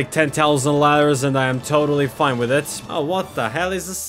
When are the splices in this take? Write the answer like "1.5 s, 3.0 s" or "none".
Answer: 2.8 s